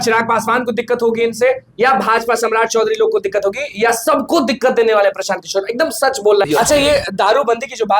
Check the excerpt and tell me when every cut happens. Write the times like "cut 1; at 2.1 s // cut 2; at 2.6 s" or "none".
cut 1; at 6.4 s